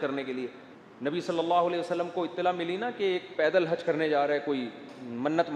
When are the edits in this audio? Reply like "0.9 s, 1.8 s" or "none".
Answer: 1.1 s